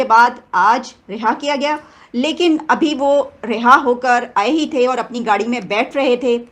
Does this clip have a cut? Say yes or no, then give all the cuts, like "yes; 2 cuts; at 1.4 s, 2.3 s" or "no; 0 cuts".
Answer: no; 0 cuts